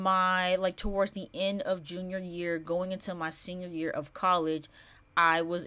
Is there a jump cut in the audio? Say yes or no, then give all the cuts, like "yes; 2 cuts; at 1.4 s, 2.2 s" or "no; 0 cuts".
no; 0 cuts